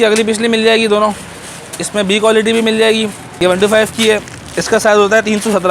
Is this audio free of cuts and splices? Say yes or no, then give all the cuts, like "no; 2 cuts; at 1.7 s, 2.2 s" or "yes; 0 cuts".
no; 1 cut; at 3.2 s